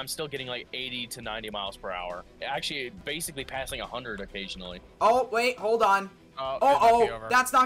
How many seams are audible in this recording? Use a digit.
1